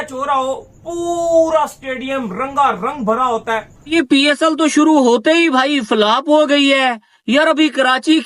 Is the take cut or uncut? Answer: cut